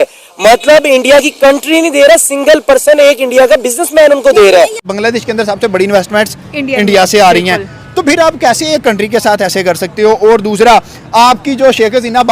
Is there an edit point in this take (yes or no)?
yes